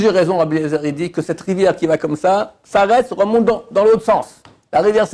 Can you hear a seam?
no; 0 cuts

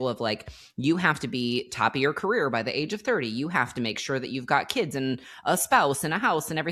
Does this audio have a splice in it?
no; 0 cuts

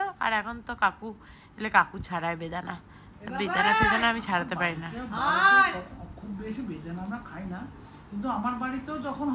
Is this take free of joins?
yes; 0 cuts

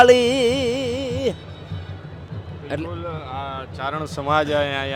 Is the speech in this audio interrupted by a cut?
no; 0 cuts

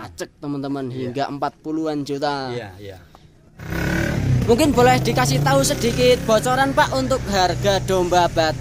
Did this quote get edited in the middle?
yes; 1 cut; at 3.6 s

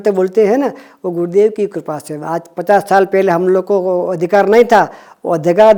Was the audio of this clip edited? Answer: no; 0 cuts

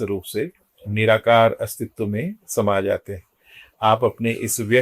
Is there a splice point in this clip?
no; 0 cuts

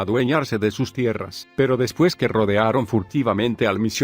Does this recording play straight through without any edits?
no; 1 cut; at 2.6 s

